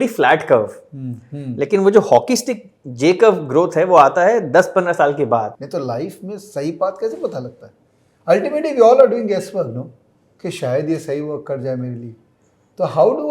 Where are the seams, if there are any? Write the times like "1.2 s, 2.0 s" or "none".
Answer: 5.5 s